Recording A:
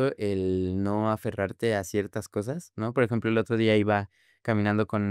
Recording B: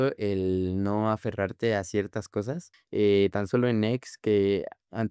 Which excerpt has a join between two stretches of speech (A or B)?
B